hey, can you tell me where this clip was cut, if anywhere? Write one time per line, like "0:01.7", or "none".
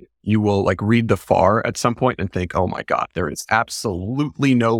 none

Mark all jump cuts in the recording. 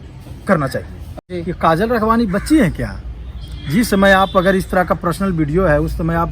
0:01.2

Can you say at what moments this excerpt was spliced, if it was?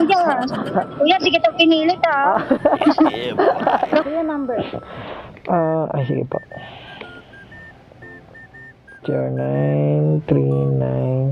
0:04.0

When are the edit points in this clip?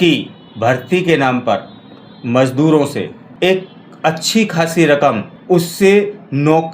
0:03.2
0:05.3

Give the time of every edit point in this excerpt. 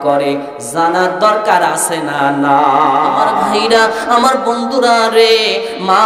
0:03.5

